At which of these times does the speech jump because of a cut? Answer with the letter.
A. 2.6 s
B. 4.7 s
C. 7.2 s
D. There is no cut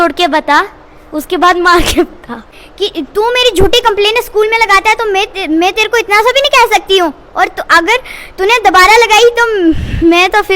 A